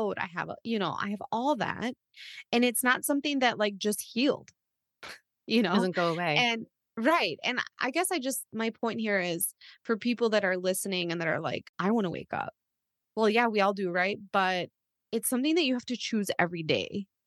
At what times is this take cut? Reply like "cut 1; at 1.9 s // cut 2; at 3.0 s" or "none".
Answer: cut 1; at 11.7 s

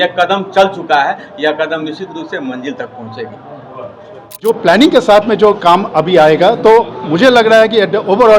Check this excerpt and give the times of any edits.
cut 1; at 4.4 s

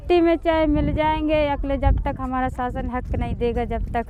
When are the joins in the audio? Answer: none

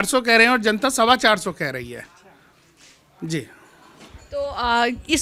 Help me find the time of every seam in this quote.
none

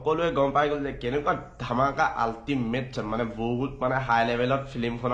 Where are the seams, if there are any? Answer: none

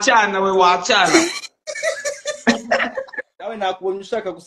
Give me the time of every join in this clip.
cut 1; at 3.4 s

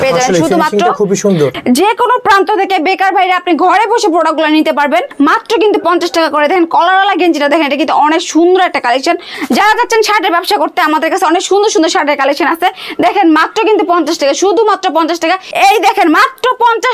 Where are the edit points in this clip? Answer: cut 1; at 1.5 s // cut 2; at 5.1 s // cut 3; at 9.3 s // cut 4; at 15.5 s

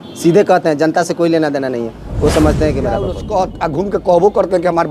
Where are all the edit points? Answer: cut 1; at 3.2 s

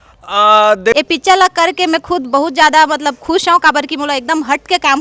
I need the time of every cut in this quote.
cut 1; at 0.9 s

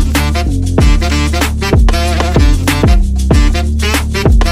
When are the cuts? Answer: none

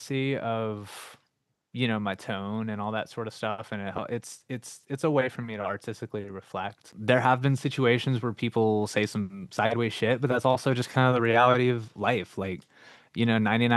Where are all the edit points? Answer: cut 1; at 6.9 s

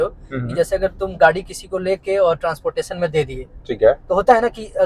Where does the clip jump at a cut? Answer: none

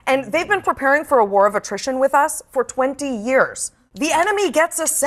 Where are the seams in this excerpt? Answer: cut 1; at 3.8 s

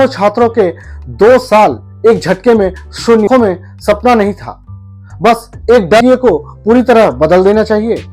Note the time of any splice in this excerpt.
cut 1; at 3.3 s // cut 2; at 6.0 s

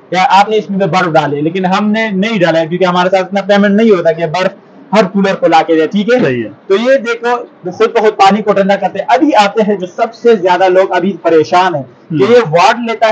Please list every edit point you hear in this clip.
none

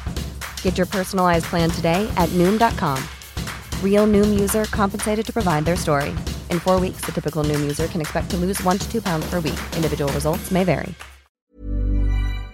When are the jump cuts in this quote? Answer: cut 1; at 11.4 s

